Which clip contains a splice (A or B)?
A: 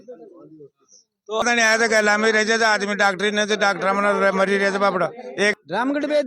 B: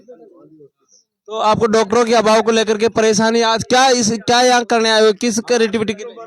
A